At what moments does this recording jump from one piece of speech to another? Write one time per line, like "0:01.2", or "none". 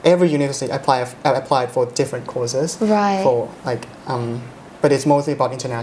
none